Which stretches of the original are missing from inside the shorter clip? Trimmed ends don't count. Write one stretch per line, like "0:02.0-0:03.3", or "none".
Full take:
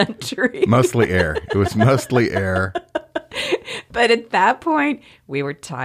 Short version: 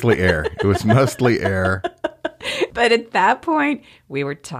0:03.6-0:03.9